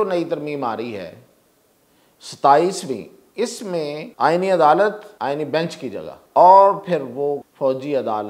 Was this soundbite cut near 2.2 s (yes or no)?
no